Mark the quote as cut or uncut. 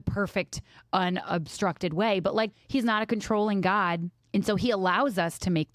cut